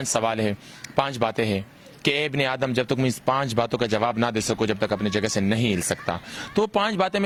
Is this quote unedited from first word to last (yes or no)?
yes